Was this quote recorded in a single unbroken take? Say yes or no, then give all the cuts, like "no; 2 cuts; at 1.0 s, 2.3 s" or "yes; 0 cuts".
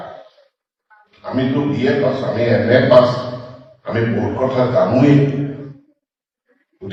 yes; 0 cuts